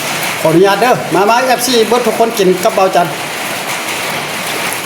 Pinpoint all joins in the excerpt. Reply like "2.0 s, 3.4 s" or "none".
none